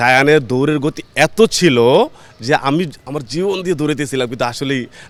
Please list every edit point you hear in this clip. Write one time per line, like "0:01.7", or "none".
none